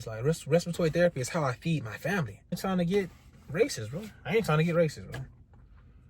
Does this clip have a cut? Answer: yes; 1 cut; at 2.6 s

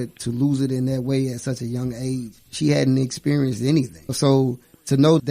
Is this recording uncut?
no; 1 cut; at 4.0 s

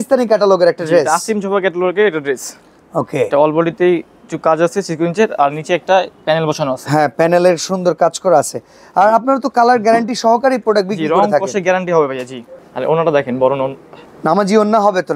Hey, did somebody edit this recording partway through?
no; 0 cuts

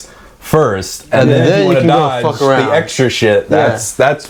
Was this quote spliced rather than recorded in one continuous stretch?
no; 0 cuts

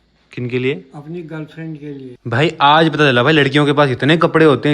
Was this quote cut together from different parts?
yes; 1 cut; at 2.1 s

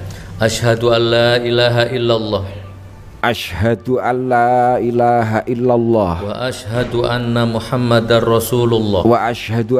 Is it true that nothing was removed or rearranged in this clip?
yes; 0 cuts

